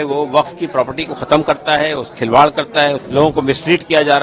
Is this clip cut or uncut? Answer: cut